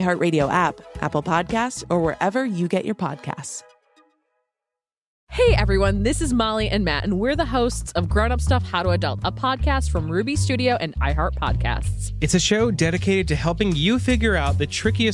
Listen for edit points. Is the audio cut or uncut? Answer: cut